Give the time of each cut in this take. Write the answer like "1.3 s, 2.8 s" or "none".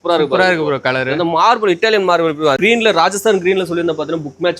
2.6 s